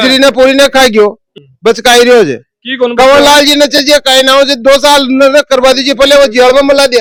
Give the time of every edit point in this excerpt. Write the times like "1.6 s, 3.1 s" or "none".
none